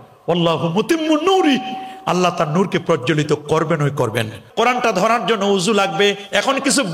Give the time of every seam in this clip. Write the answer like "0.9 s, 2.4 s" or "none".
4.4 s